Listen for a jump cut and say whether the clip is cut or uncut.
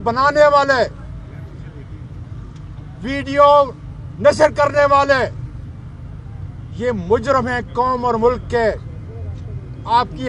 uncut